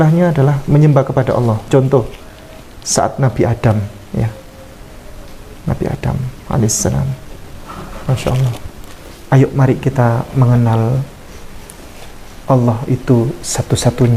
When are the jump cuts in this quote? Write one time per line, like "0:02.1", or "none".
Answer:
0:09.0